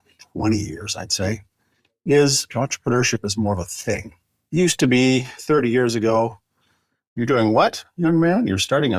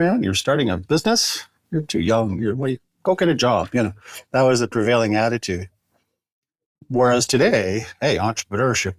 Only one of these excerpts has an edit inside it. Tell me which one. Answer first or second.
first